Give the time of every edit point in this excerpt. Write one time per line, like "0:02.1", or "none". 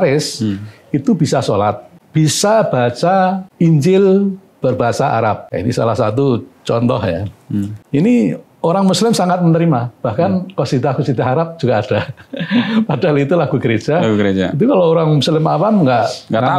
0:01.9
0:03.4
0:05.4
0:07.8